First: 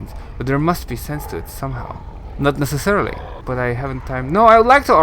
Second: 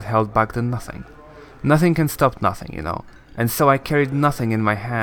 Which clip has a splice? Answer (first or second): first